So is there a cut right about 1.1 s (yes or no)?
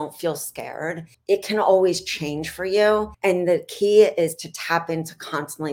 yes